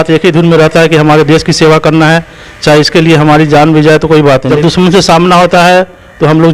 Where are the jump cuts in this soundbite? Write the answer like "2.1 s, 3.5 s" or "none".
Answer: 4.5 s